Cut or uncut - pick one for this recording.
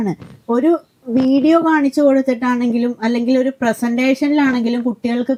uncut